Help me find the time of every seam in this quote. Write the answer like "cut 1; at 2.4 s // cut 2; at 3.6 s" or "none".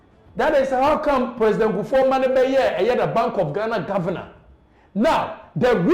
none